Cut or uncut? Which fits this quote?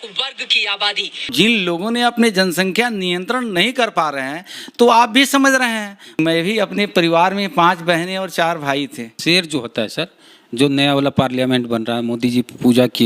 cut